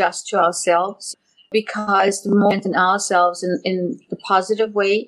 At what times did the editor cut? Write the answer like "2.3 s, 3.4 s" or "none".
1.1 s